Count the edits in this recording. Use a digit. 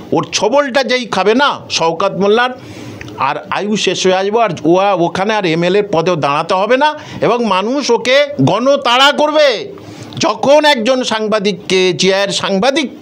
0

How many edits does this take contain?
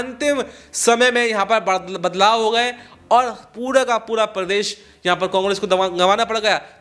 0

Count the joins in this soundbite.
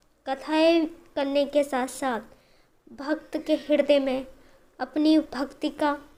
0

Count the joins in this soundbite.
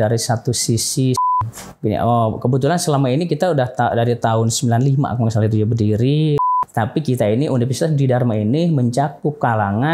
2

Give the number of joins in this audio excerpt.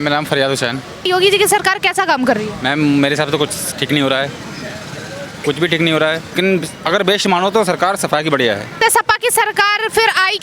3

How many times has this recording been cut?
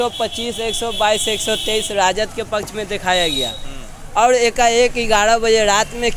0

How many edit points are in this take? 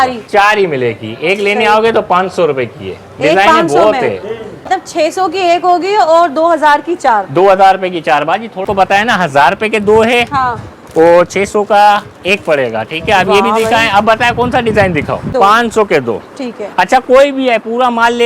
3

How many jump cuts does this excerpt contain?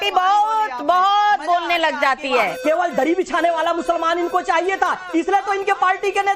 1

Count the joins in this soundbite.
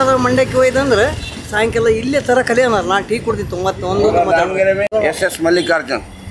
1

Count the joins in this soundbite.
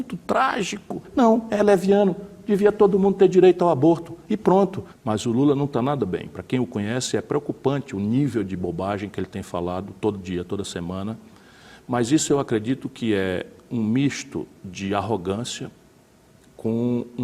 2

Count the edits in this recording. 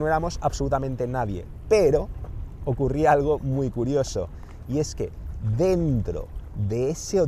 0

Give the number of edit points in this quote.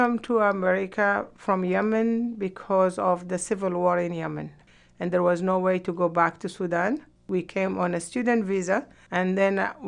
3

